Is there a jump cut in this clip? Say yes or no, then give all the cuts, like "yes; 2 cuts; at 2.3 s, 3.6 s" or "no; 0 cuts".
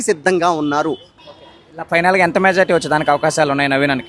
yes; 1 cut; at 1.1 s